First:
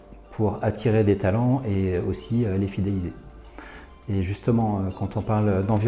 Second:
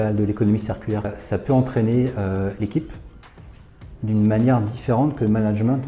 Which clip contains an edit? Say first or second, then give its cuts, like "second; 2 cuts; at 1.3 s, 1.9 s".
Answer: second; 1 cut; at 1.1 s